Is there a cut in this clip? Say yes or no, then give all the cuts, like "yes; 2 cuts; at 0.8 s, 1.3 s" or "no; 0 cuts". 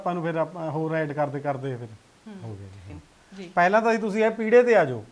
yes; 1 cut; at 2.9 s